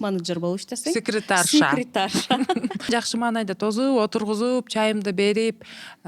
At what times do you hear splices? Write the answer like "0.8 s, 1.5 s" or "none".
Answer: 2.9 s